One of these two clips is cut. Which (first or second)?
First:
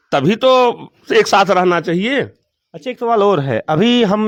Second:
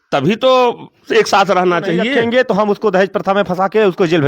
second